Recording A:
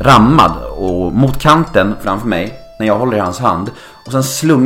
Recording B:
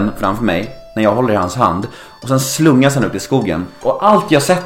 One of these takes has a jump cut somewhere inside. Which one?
B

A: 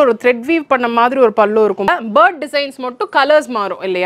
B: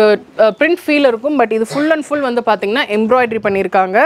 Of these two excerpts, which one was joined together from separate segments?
A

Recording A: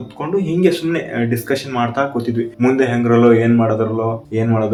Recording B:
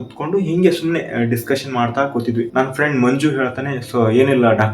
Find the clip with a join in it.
B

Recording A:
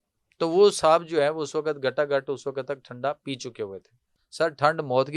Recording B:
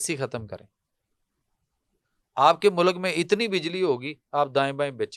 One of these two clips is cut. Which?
A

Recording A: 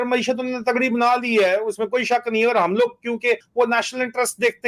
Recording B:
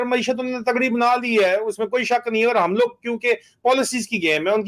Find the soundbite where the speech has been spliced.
A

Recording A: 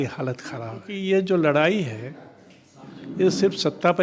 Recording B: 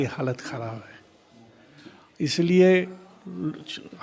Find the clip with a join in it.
A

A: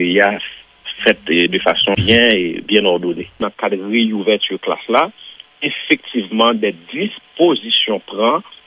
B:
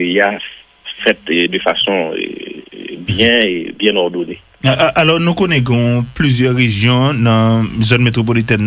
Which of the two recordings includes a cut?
A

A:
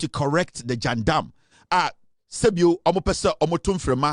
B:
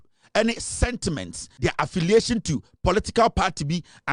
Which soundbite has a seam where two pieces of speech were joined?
B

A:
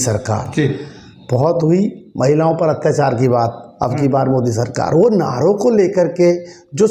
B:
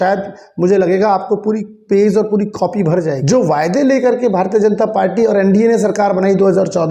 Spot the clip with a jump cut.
B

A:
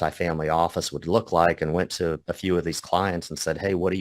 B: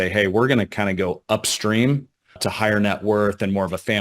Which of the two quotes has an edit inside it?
B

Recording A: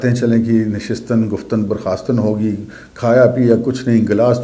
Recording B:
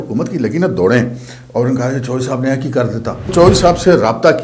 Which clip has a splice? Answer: B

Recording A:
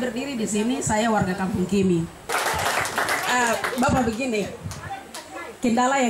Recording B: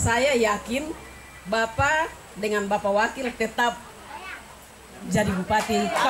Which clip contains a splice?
A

